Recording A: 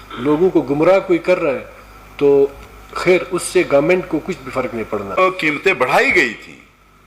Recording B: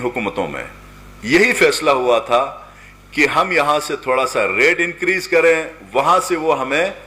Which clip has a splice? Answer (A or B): A